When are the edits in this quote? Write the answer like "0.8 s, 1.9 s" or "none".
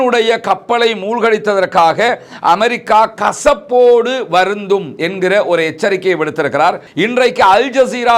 6.9 s

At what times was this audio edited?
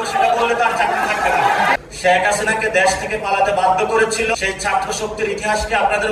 1.9 s, 4.4 s

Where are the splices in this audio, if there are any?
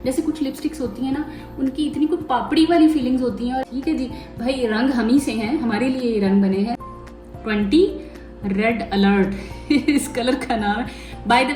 3.7 s, 6.8 s

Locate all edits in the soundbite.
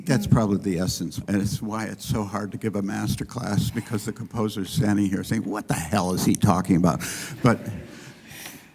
1.2 s

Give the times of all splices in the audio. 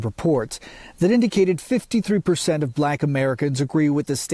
1.5 s

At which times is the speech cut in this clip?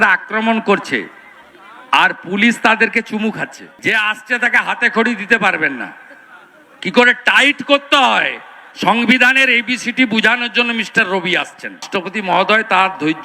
3.6 s, 11.8 s

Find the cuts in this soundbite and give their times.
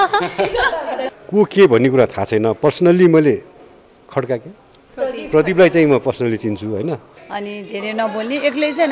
1.1 s, 7.2 s

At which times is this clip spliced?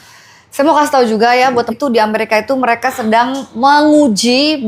1.5 s

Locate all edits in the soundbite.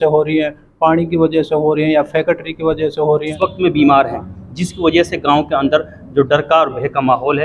3.3 s

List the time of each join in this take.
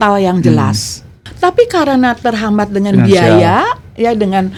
none

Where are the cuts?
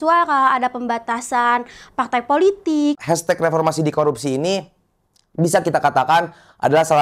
3.0 s

